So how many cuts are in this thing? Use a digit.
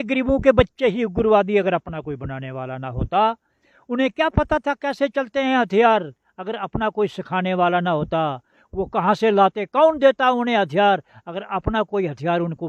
0